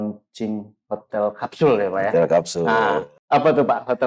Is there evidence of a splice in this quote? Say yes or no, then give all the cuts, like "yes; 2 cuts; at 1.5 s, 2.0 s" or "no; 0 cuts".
yes; 1 cut; at 3.1 s